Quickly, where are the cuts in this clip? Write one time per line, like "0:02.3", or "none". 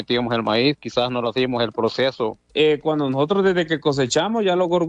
0:02.4